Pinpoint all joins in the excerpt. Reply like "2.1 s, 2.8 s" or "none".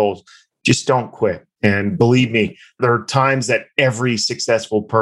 1.5 s